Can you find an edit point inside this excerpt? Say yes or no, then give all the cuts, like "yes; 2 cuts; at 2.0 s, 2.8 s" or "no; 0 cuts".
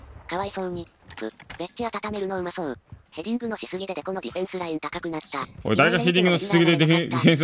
no; 0 cuts